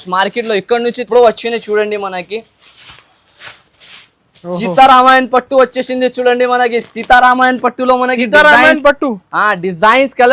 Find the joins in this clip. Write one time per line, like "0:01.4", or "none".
0:01.0